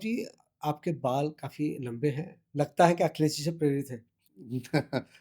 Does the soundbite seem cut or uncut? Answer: uncut